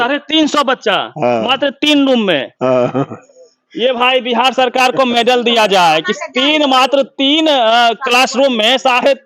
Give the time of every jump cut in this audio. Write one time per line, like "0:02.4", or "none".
none